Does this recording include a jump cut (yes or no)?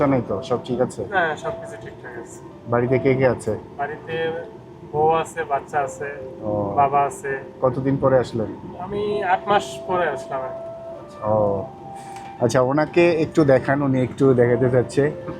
no